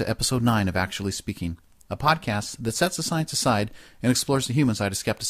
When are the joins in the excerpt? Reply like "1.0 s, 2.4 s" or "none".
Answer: 3.7 s